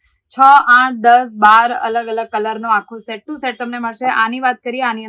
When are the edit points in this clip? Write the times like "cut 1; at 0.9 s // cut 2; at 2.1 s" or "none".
none